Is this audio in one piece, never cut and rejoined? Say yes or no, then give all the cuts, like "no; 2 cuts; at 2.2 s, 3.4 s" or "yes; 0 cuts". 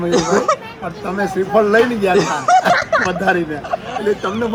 yes; 0 cuts